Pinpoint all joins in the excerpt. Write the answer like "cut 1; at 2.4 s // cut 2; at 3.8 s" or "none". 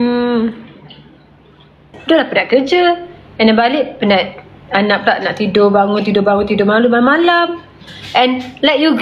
cut 1; at 1.9 s